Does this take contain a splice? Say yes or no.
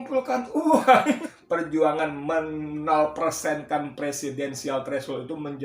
yes